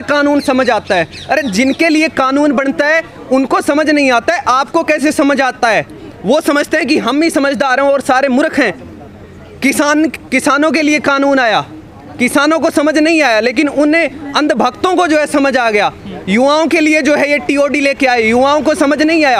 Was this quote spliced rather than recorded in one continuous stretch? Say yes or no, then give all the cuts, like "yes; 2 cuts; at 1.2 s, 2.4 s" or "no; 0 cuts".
no; 0 cuts